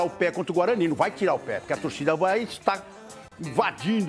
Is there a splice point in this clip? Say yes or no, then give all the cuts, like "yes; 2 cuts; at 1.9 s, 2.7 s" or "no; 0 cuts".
no; 0 cuts